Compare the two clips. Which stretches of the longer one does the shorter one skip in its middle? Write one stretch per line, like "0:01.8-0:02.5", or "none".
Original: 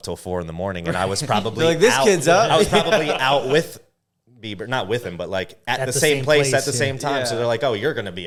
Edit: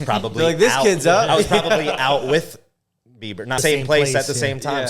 0:04.8-0:06.0